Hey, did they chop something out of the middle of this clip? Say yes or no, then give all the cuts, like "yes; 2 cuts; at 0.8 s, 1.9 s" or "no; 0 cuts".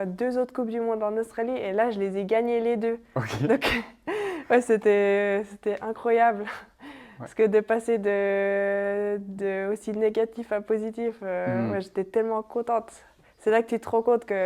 no; 0 cuts